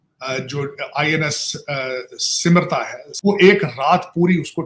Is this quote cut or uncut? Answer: cut